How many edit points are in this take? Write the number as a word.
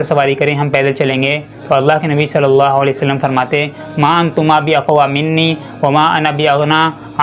zero